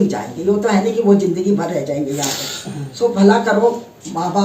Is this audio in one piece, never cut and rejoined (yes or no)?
yes